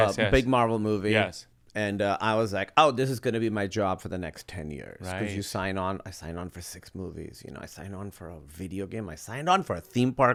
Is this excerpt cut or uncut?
uncut